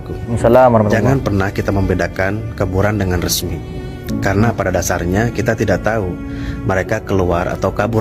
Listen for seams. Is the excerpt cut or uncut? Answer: uncut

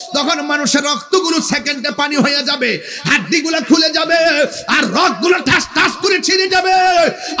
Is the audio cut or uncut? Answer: uncut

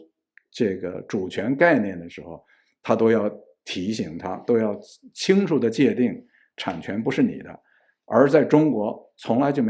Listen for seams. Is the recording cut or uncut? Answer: uncut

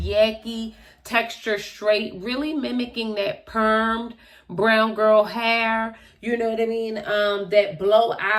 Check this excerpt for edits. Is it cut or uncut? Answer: uncut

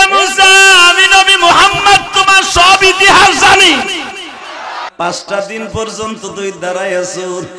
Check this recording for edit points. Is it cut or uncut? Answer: cut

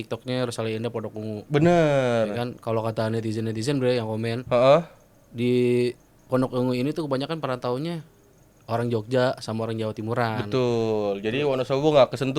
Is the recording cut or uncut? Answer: uncut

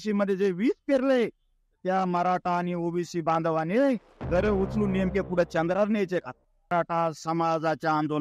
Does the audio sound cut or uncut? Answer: cut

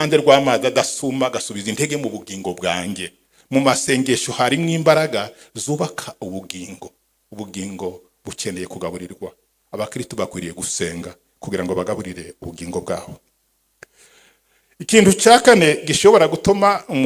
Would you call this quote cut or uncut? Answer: uncut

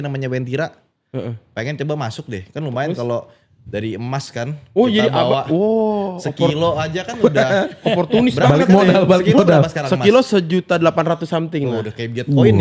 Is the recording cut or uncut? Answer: uncut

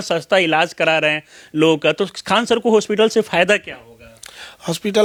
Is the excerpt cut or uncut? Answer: uncut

